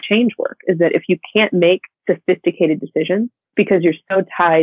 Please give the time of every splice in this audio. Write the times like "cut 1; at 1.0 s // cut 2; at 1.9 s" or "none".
cut 1; at 1.9 s // cut 2; at 3.4 s

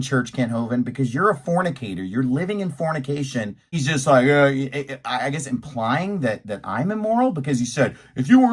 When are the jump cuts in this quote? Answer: cut 1; at 3.8 s

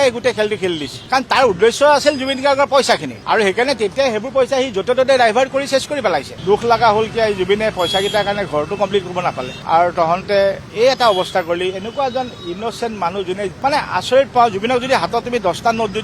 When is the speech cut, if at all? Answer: cut 1; at 6.3 s // cut 2; at 13.5 s

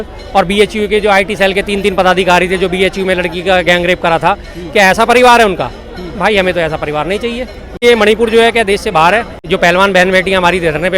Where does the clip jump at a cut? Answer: cut 1; at 7.8 s // cut 2; at 9.4 s

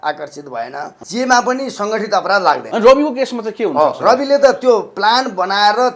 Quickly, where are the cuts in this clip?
cut 1; at 1.0 s // cut 2; at 2.7 s

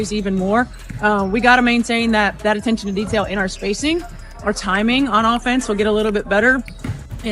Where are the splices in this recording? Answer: cut 1; at 6.2 s

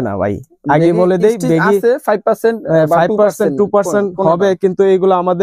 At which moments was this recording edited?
none

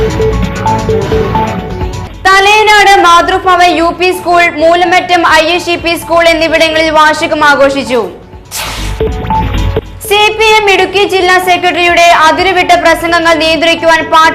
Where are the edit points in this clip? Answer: cut 1; at 1.7 s

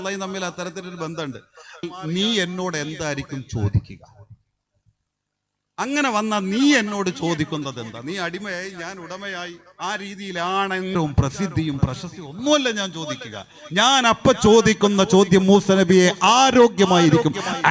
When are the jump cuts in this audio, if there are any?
cut 1; at 1.8 s // cut 2; at 10.9 s

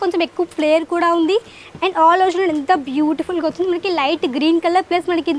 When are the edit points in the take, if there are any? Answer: none

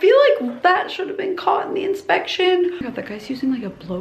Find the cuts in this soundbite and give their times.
cut 1; at 2.9 s

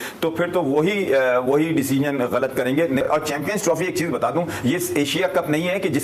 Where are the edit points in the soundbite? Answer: none

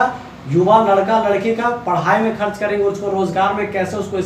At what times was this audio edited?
none

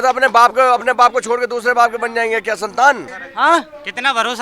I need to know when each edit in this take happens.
cut 1; at 3.1 s

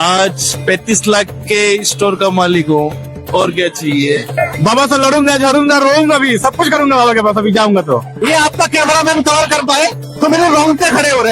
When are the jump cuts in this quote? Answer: cut 1; at 4.3 s // cut 2; at 8.1 s

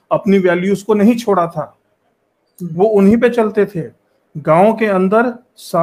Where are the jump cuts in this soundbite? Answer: none

